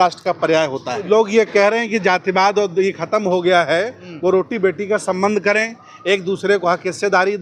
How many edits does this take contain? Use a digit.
1